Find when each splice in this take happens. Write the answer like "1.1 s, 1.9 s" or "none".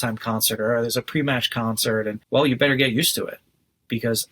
2.2 s